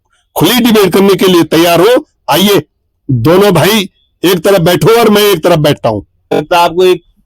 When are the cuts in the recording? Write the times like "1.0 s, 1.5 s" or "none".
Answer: 6.3 s